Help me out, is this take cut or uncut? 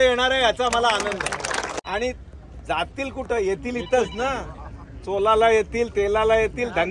cut